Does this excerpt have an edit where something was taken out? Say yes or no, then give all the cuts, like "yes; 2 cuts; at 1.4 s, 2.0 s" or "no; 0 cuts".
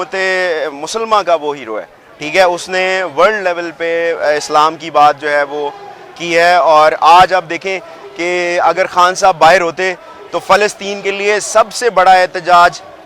no; 0 cuts